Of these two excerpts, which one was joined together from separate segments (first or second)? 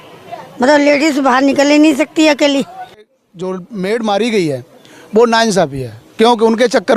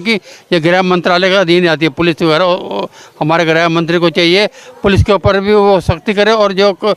first